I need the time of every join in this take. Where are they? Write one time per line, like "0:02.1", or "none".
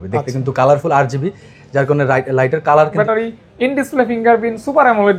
0:02.9